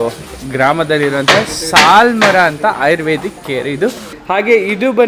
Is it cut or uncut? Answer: cut